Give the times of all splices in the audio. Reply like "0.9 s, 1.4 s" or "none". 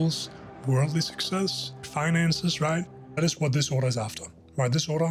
1.9 s, 3.2 s